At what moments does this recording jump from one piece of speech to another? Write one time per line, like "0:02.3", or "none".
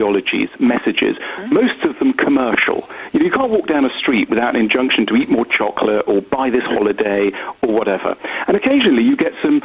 0:07.2